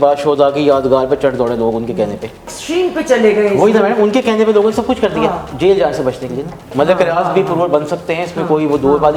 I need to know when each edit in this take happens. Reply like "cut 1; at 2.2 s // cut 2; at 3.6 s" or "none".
cut 1; at 2.5 s // cut 2; at 5.5 s // cut 3; at 6.7 s